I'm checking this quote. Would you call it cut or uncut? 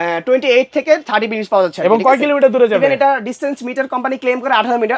uncut